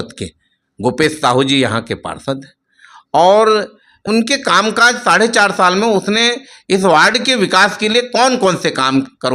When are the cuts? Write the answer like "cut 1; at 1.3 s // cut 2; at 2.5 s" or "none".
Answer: cut 1; at 4.0 s